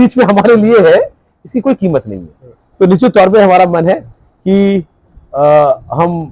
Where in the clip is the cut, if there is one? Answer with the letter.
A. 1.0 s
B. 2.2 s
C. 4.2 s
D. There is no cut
D